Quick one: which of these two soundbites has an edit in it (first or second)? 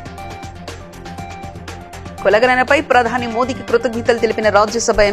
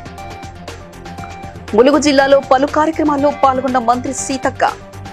second